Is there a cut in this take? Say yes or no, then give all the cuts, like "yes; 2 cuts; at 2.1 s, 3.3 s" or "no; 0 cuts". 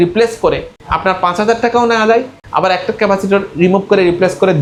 no; 0 cuts